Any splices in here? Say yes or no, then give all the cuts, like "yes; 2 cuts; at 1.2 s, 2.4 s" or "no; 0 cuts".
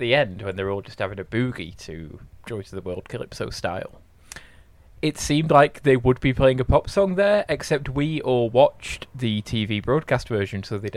no; 0 cuts